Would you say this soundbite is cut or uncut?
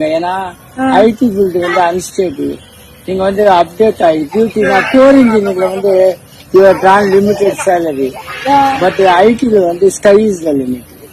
uncut